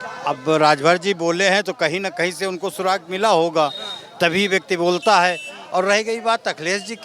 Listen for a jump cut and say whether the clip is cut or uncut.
uncut